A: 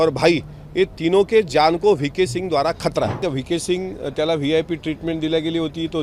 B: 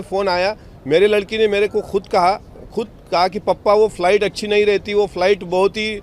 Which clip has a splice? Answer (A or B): A